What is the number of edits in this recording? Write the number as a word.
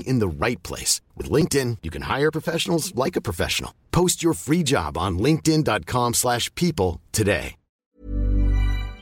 one